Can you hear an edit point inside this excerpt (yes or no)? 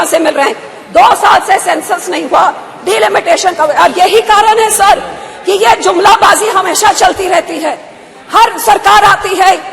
no